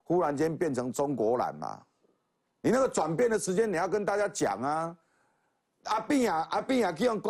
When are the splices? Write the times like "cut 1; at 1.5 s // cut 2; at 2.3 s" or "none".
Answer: none